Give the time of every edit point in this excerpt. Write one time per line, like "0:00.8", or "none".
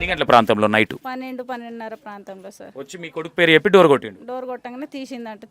0:01.0
0:02.6

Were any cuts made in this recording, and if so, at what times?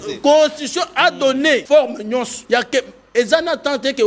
0:01.6
0:02.4

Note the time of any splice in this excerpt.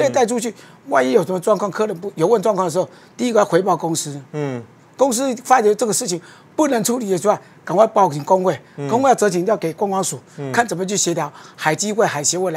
none

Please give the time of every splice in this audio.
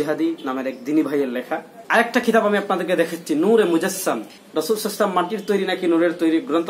0:01.7
0:04.4

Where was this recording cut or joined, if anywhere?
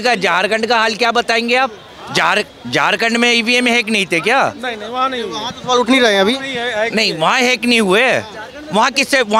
none

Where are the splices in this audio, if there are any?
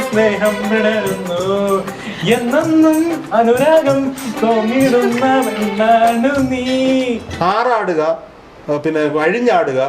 0:07.3

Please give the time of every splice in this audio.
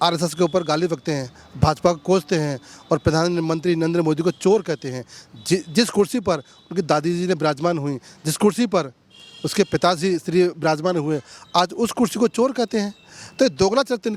none

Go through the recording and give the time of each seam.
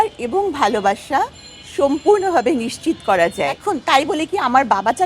0:03.6

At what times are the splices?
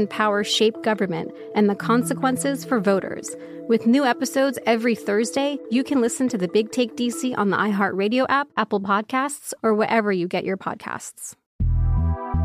0:11.4

